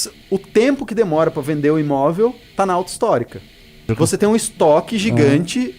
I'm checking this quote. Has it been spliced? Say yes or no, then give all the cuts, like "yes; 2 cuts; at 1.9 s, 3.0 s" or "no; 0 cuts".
yes; 1 cut; at 3.9 s